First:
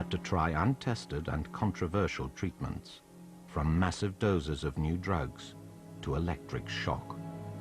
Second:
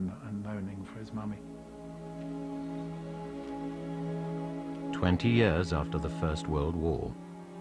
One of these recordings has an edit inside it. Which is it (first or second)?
first